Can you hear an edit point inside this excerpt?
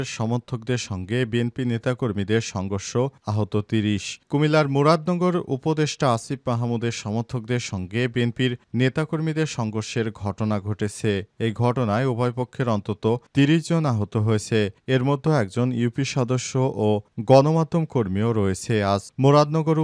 no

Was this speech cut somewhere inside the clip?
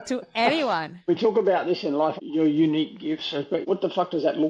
yes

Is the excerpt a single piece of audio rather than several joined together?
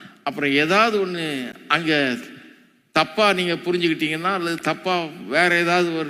yes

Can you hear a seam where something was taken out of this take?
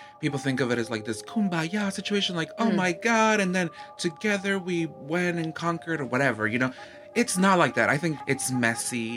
yes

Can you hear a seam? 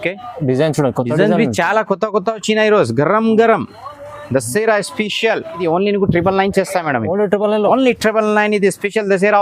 yes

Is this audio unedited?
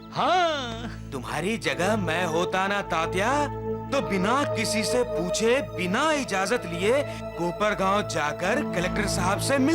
yes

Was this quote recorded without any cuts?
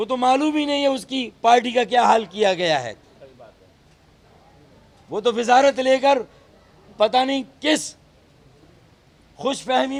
yes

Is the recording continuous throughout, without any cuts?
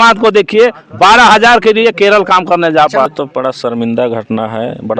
no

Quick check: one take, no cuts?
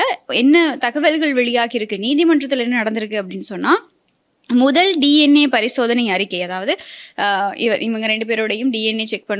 yes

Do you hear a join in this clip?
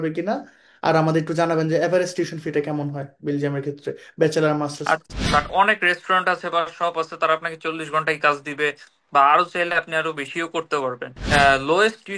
yes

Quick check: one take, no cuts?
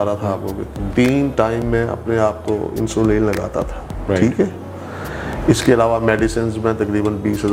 yes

